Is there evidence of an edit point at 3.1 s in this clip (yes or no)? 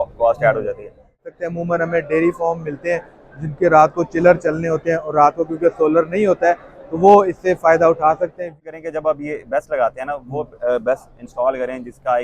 no